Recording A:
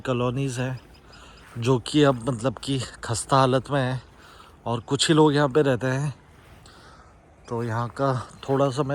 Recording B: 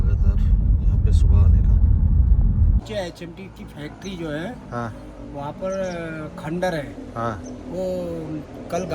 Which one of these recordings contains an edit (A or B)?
B